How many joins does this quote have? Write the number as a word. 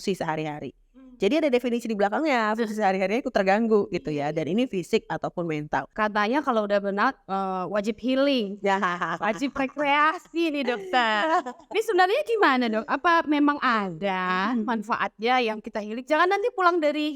one